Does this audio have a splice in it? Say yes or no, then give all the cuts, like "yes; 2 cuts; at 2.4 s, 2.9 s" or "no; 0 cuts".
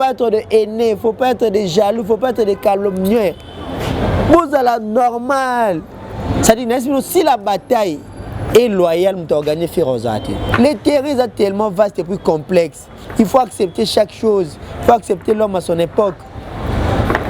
yes; 1 cut; at 10.5 s